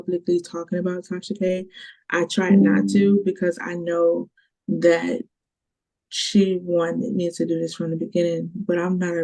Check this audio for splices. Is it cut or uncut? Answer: uncut